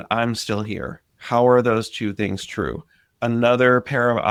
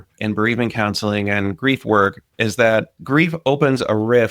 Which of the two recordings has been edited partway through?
second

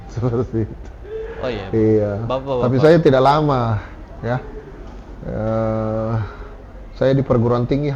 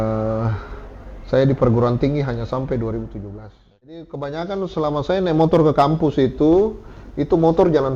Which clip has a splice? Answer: second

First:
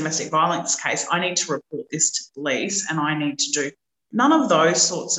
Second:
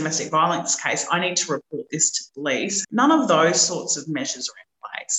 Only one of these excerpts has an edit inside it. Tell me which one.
second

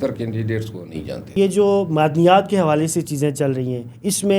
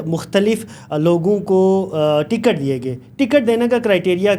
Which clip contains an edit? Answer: first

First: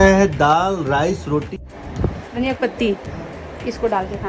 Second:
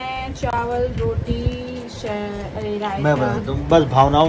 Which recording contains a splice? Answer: first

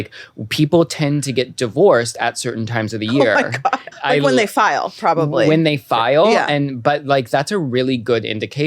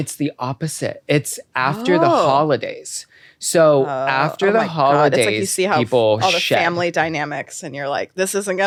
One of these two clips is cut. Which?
first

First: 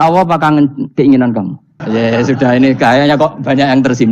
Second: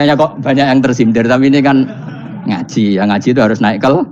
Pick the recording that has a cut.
first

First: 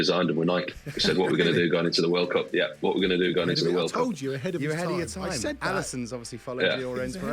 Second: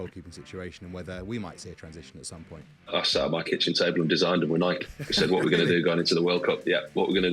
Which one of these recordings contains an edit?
second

